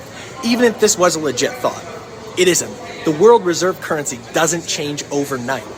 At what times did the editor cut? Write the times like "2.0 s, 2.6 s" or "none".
none